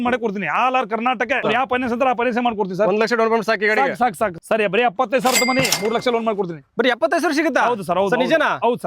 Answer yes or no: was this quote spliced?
yes